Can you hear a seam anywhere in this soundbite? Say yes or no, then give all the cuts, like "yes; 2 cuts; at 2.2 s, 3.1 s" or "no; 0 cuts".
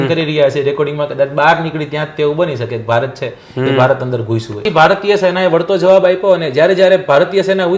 yes; 1 cut; at 4.6 s